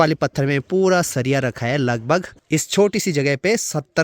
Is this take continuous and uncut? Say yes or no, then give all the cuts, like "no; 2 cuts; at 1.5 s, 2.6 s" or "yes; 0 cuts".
no; 1 cut; at 2.3 s